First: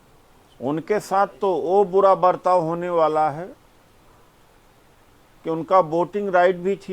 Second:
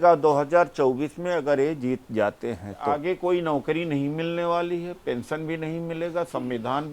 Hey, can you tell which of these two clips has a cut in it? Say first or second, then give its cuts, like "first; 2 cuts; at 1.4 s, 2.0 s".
second; 1 cut; at 2.9 s